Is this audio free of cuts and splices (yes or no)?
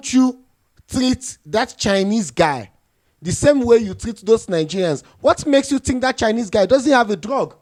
yes